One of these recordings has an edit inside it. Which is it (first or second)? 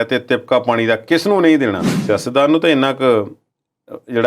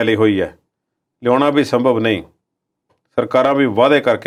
first